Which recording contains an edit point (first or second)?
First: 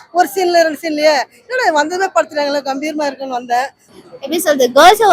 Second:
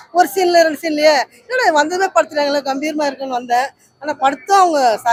first